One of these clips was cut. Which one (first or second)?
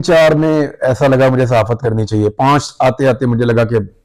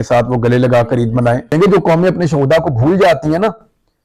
second